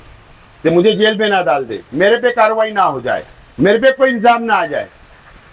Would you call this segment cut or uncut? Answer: uncut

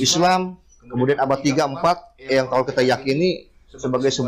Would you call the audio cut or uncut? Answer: uncut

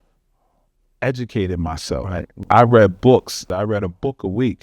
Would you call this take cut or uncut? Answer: cut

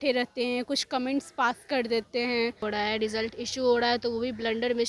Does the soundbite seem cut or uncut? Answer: cut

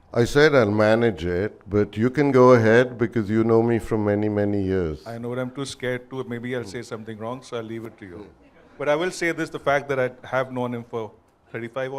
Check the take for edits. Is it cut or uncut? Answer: uncut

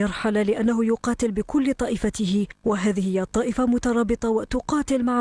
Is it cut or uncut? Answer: cut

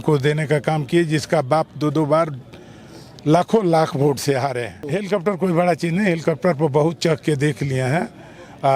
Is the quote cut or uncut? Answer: cut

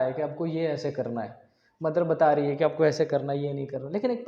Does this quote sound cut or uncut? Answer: uncut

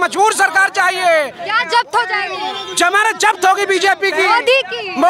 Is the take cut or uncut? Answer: uncut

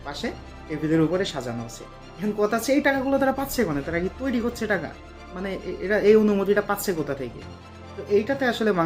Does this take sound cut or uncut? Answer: uncut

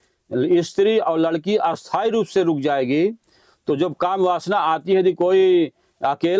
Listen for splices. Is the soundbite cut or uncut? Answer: uncut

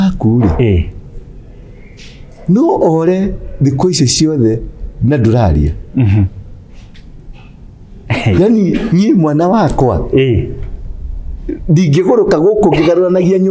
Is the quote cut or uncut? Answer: uncut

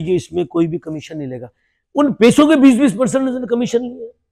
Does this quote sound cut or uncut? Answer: uncut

